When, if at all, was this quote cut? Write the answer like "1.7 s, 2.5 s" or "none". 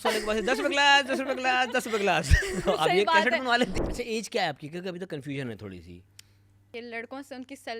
3.7 s, 6.7 s